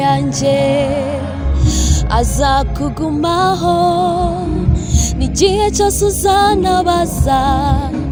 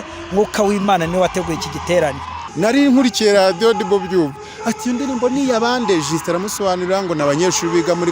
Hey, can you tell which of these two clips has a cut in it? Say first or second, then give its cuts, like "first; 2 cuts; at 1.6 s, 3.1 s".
second; 1 cut; at 2.4 s